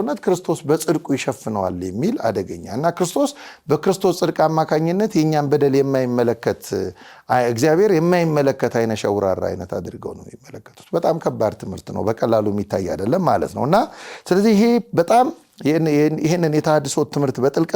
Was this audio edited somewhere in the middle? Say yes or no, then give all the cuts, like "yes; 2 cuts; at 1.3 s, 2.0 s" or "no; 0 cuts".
no; 0 cuts